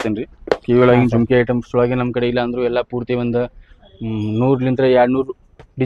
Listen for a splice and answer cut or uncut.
uncut